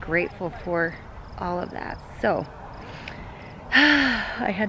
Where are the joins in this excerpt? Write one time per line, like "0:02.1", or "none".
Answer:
none